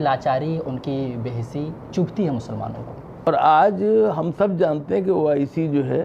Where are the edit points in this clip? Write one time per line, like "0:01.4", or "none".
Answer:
0:03.3